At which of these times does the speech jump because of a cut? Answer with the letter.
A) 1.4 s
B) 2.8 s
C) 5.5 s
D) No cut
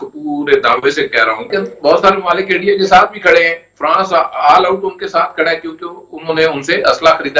A